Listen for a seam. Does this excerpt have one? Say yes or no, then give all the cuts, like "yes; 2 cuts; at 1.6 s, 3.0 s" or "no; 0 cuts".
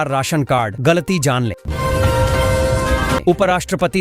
yes; 2 cuts; at 1.6 s, 3.2 s